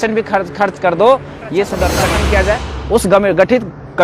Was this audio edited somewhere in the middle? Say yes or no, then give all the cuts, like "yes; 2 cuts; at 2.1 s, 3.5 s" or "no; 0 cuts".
yes; 1 cut; at 2.0 s